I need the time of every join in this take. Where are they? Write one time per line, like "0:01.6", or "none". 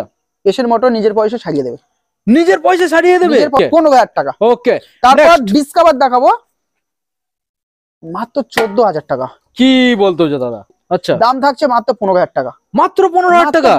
0:03.5
0:10.7